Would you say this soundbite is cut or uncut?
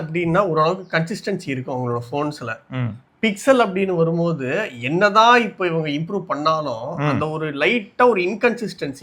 uncut